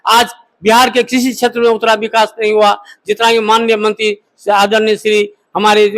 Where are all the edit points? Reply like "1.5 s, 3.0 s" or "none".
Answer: none